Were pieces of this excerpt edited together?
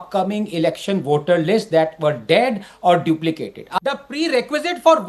yes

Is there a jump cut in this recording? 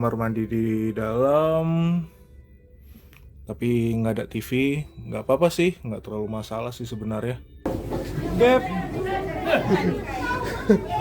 yes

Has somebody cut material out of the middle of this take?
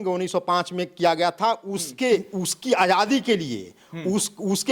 yes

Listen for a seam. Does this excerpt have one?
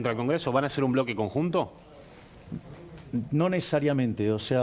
no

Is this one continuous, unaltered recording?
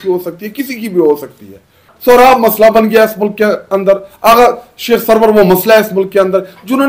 no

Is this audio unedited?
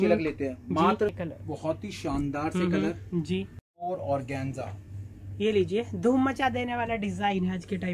no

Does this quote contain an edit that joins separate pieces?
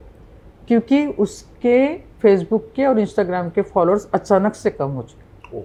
no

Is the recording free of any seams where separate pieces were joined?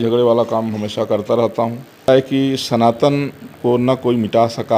no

